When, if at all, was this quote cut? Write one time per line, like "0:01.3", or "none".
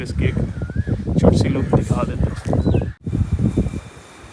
0:03.0